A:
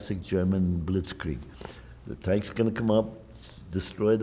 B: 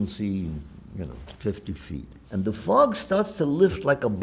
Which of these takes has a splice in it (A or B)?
B